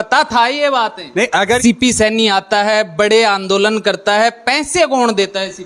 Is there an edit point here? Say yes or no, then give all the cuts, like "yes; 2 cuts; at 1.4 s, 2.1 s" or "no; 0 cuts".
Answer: yes; 1 cut; at 1.6 s